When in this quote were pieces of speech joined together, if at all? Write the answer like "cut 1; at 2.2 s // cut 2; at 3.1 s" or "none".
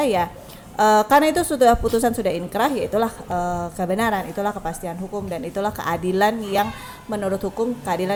none

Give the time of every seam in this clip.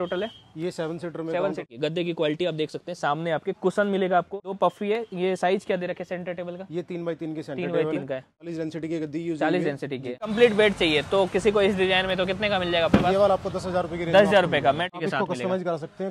cut 1; at 1.7 s // cut 2; at 4.4 s // cut 3; at 8.4 s // cut 4; at 10.3 s // cut 5; at 14.9 s

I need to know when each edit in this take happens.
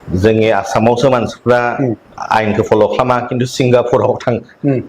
cut 1; at 0.9 s

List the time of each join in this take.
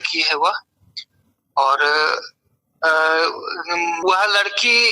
cut 1; at 4.0 s

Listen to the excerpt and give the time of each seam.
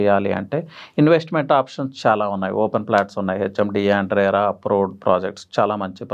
none

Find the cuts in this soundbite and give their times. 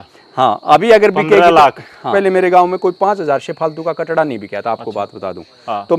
cut 1; at 2.1 s

